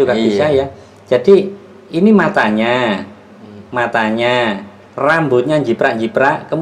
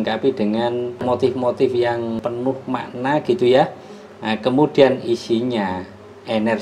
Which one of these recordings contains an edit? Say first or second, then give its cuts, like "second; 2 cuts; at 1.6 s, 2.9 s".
second; 2 cuts; at 1.0 s, 2.2 s